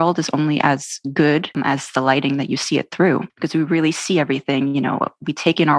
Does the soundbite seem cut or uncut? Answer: uncut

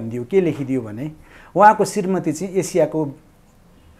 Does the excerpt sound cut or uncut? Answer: uncut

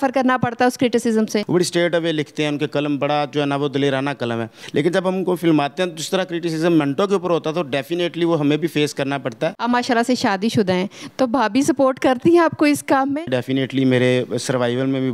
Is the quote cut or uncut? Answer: cut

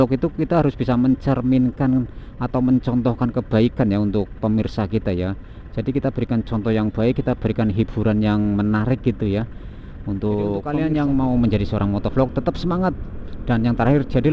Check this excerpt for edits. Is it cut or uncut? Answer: cut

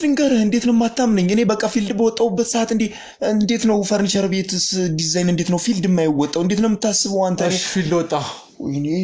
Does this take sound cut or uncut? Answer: uncut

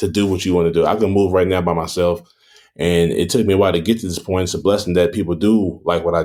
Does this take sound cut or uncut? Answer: uncut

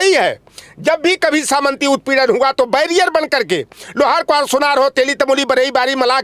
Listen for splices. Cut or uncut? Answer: uncut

